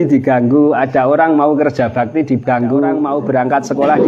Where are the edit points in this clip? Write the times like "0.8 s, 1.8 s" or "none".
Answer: 3.0 s